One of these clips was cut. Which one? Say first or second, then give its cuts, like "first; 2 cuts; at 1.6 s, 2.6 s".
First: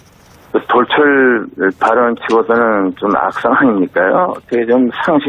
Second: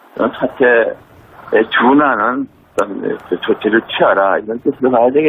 second; 1 cut; at 4.2 s